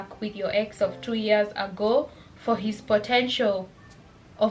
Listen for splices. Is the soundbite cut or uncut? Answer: uncut